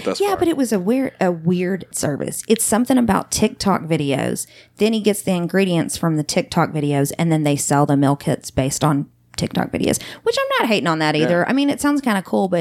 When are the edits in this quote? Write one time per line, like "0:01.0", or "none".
0:01.9